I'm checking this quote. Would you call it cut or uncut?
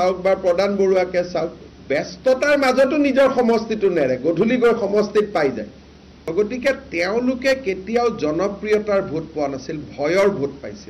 cut